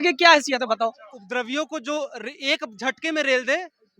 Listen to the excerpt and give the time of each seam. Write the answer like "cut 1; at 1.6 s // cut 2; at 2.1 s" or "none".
cut 1; at 1.1 s